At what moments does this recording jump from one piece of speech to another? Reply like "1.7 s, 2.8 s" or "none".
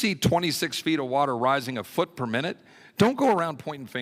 none